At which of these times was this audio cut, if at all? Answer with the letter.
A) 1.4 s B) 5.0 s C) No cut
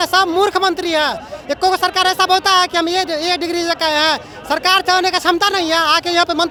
C